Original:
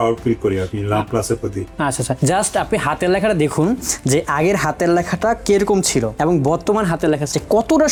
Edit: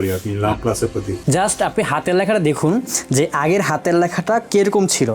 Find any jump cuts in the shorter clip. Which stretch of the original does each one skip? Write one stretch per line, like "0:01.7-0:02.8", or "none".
0:01.7-0:02.2

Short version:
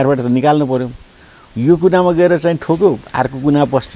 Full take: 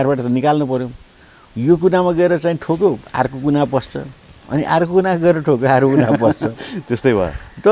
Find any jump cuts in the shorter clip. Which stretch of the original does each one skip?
none

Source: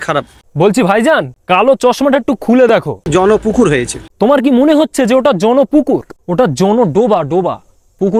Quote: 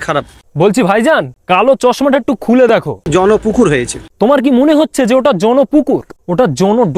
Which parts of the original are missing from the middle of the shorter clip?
none

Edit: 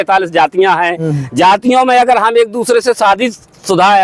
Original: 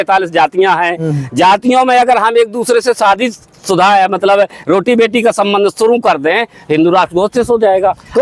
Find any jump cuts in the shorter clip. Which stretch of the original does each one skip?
none

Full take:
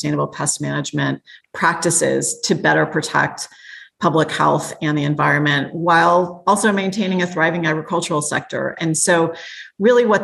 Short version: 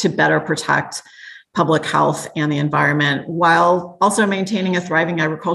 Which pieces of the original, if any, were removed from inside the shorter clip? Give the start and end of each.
none

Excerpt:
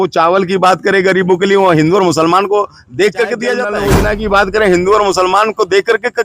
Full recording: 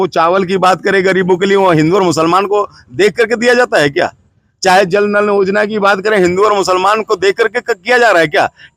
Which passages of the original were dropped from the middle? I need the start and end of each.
0:03.7-0:05.2

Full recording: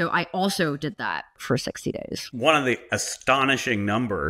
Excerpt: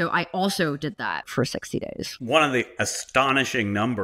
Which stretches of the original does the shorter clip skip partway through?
0:01.2-0:01.4

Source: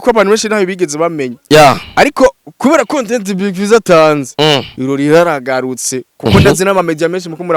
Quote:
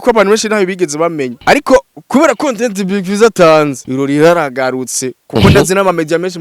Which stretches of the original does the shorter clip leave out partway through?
0:01.3-0:01.9
0:04.3-0:04.7

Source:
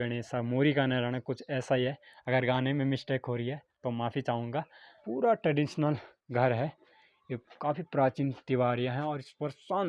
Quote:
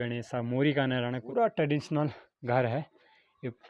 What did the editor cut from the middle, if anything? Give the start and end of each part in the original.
0:01.2-0:05.1

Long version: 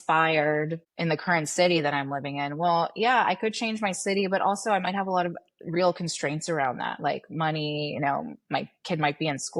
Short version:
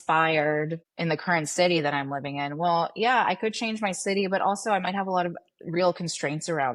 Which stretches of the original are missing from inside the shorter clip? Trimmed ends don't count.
none

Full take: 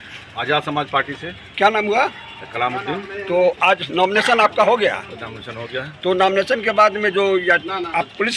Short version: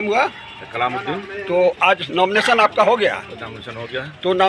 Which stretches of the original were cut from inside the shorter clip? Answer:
none

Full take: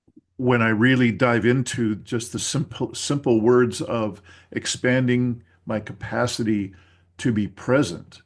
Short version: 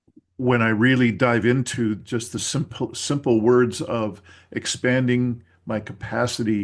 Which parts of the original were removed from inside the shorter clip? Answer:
none

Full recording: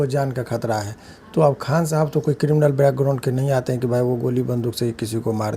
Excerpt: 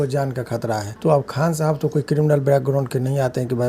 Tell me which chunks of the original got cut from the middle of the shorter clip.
0:00.9-0:01.2

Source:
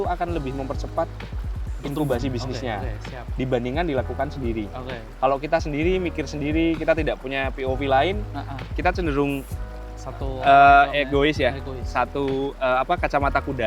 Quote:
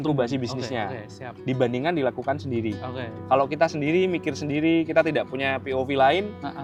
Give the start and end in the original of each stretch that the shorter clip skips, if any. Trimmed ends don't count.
none

